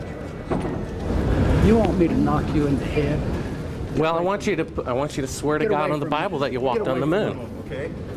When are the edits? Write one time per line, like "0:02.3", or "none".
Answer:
0:01.0